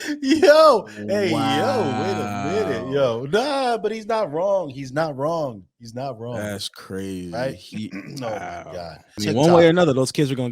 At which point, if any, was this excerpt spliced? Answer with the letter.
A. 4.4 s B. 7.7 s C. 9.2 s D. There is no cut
C